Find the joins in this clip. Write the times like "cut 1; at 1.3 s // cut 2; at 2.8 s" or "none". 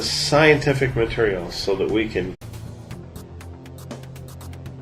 none